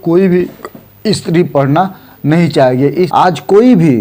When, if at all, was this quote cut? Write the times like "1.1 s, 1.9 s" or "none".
3.1 s